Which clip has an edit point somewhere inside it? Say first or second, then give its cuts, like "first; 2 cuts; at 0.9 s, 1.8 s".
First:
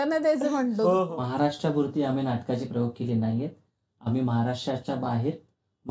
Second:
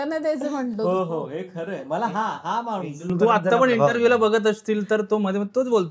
first; 1 cut; at 1.1 s